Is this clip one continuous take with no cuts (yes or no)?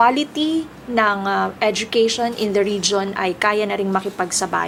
yes